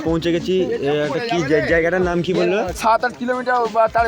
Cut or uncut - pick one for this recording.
cut